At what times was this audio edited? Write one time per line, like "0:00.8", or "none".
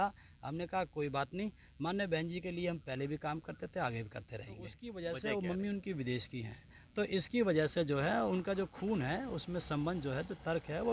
0:04.8

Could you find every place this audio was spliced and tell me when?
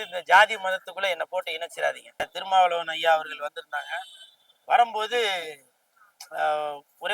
0:02.2

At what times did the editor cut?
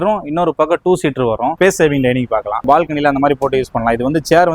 0:01.5
0:02.6

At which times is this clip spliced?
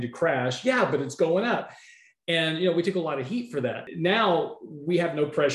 0:03.8

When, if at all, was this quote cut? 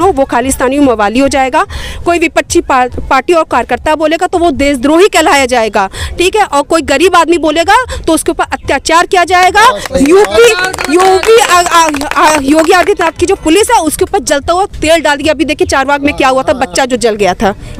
none

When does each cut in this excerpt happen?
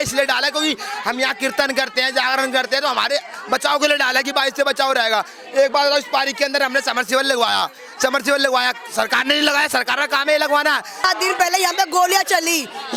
0:11.1

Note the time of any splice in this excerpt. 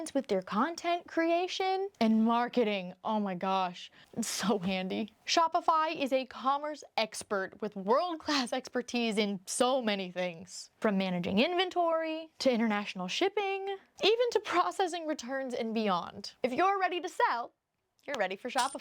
0:04.0

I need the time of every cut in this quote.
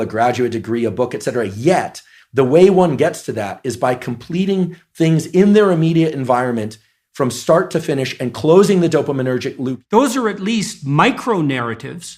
0:09.7

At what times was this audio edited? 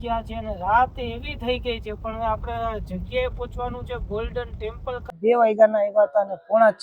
0:05.1

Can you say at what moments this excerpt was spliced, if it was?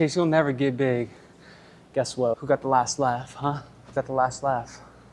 0:02.3
0:03.9

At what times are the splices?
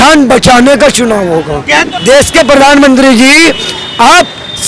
0:01.8

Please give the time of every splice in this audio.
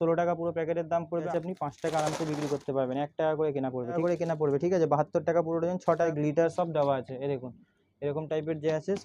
0:01.3
0:04.0
0:06.1

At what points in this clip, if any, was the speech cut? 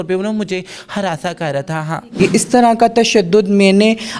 0:02.2

